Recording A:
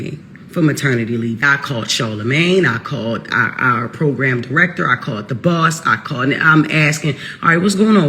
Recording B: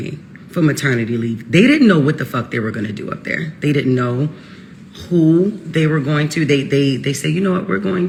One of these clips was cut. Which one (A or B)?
A